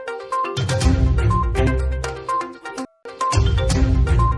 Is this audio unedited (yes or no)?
no